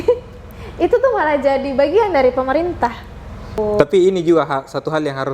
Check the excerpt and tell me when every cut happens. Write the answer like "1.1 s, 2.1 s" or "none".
3.6 s